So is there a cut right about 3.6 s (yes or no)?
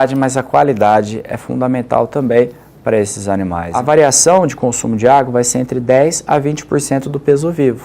yes